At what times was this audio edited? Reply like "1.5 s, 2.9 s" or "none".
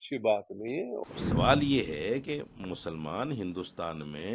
1.0 s